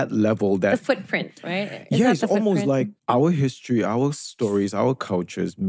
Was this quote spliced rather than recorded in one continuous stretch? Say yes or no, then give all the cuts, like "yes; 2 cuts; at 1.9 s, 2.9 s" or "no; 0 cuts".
no; 0 cuts